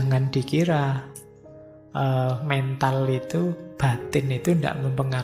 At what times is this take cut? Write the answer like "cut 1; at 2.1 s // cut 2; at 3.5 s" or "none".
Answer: none